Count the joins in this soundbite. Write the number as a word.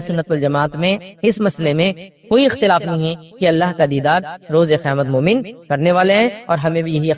one